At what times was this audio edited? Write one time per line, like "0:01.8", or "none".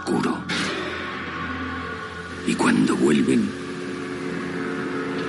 none